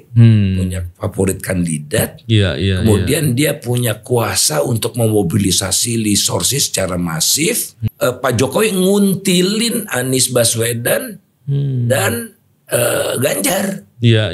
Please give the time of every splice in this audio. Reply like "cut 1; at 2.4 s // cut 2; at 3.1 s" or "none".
cut 1; at 7.8 s